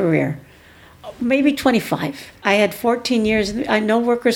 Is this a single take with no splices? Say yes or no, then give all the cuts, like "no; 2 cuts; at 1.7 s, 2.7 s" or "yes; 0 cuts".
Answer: no; 1 cut; at 2.3 s